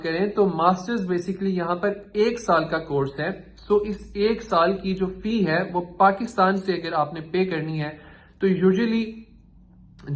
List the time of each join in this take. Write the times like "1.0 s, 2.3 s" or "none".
none